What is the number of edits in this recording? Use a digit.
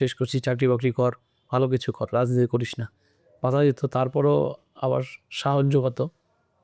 0